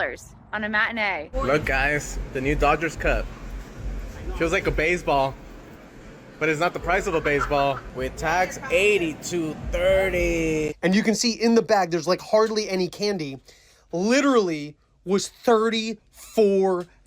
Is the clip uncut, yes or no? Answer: no